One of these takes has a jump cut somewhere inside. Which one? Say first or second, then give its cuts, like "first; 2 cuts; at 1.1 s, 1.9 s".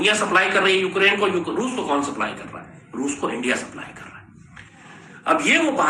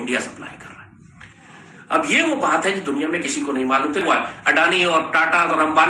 second; 1 cut; at 4.0 s